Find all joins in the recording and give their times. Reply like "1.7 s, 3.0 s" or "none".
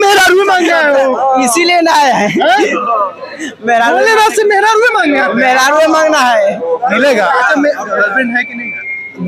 none